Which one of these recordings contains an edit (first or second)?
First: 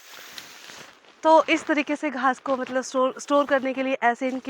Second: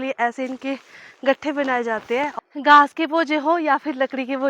second